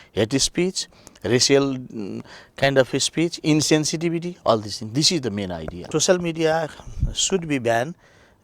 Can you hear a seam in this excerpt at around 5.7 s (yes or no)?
yes